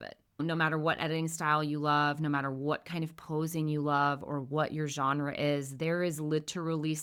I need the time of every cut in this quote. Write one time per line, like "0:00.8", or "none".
none